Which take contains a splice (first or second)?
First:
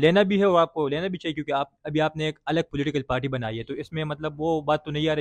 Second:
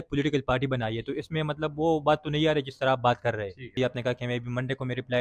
second